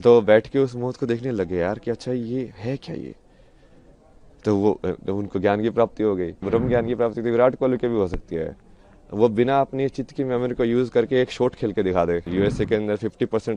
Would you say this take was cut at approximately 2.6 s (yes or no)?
no